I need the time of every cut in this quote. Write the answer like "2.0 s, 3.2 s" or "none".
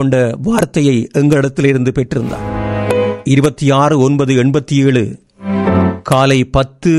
2.5 s